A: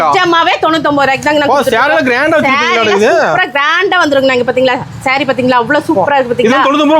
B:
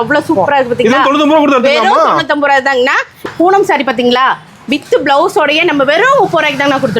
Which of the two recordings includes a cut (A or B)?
B